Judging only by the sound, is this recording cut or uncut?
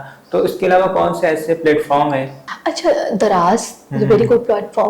cut